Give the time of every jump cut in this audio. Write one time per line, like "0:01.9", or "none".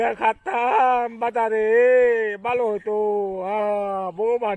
none